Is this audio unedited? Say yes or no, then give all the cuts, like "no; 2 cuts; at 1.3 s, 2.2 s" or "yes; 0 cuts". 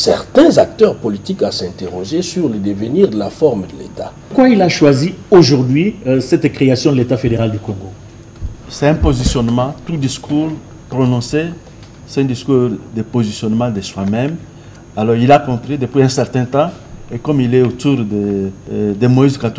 no; 2 cuts; at 4.3 s, 18.6 s